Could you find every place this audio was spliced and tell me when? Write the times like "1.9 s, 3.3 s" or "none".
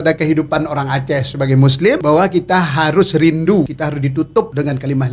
2.0 s, 4.2 s